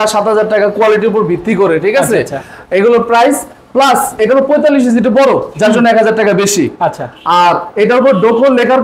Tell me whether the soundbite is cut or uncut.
uncut